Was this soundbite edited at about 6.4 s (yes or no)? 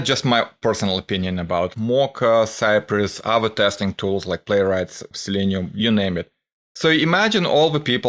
no